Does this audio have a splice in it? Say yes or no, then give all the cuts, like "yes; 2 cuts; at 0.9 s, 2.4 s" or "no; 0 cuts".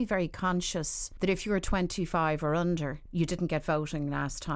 yes; 2 cuts; at 1.0 s, 3.0 s